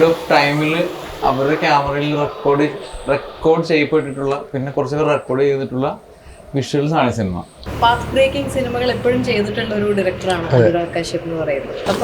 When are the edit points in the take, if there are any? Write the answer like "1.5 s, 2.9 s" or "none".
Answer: 7.6 s